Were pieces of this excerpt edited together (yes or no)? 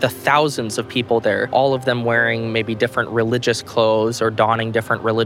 yes